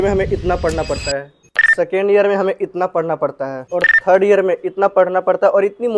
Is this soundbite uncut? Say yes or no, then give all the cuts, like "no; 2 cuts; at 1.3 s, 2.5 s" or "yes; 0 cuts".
yes; 0 cuts